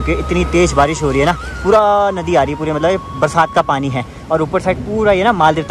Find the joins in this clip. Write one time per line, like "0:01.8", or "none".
none